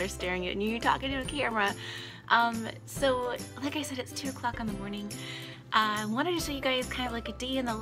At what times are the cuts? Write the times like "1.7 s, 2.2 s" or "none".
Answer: none